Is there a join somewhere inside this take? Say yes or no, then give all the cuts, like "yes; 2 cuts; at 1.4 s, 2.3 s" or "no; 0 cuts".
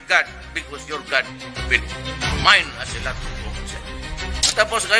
no; 0 cuts